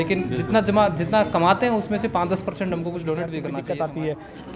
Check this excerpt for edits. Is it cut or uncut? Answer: cut